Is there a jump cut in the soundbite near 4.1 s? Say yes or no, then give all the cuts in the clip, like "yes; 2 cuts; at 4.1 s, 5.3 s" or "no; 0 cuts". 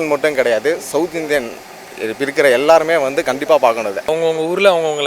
yes; 1 cut; at 4.1 s